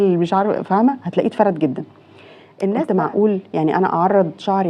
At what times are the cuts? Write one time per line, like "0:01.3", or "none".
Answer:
0:02.7